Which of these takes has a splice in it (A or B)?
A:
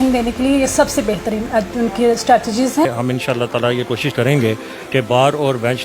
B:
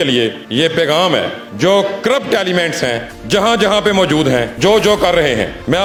A